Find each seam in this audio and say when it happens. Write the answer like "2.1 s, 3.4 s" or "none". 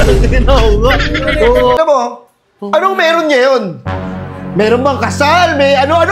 1.8 s